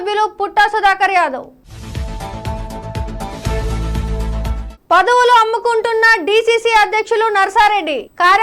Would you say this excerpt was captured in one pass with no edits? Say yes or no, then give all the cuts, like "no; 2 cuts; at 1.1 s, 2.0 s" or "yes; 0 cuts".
yes; 0 cuts